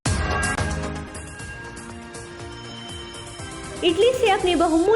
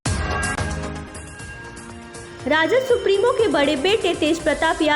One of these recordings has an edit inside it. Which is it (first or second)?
second